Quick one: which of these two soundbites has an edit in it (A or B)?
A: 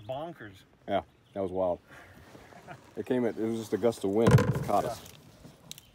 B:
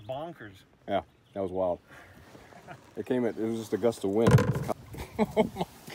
B